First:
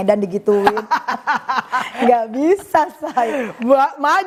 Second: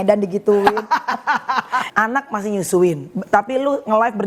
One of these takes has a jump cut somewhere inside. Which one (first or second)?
second